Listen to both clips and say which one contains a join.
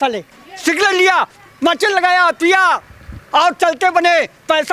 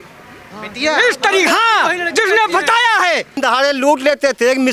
second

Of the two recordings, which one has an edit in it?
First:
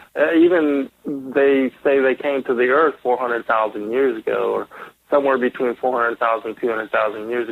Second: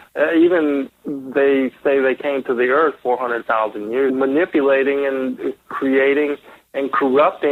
first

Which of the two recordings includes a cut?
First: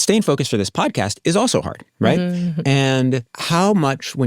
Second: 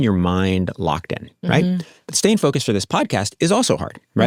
first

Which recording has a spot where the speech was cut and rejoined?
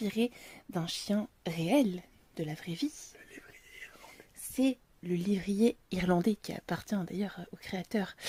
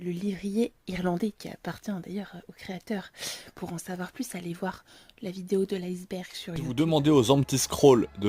second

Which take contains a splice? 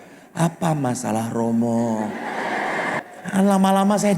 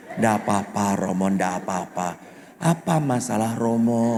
first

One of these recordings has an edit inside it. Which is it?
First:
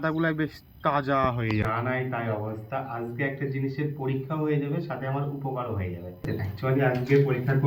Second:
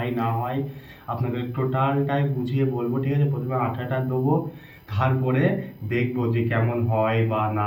first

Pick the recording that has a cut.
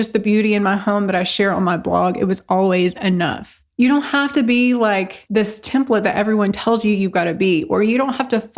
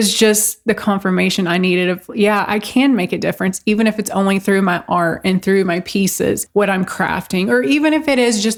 first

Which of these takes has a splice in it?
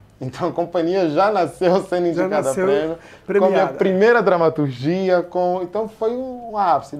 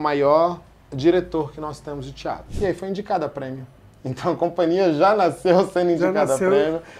second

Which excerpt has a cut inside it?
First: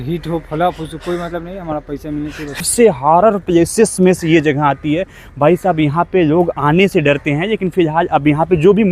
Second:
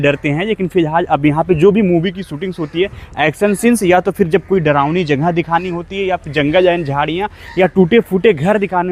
first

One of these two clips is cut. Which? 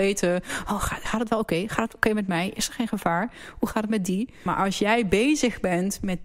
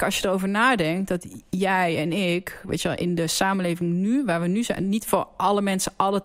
first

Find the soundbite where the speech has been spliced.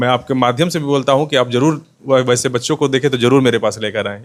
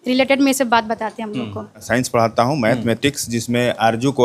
second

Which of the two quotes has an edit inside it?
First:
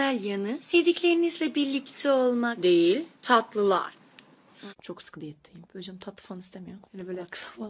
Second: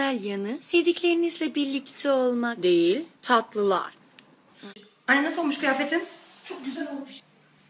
second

